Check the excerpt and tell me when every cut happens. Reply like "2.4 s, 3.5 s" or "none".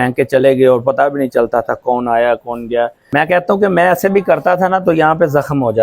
3.0 s